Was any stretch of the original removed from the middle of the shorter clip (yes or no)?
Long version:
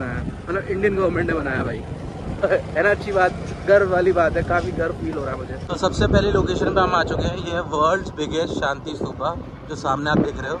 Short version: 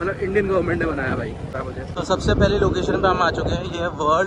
yes